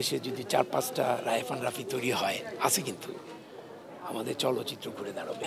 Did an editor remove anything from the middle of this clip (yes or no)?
no